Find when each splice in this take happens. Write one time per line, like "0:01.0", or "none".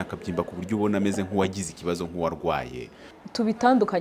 0:03.0